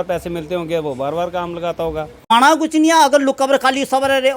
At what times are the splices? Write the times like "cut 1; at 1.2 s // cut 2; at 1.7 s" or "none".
cut 1; at 2.1 s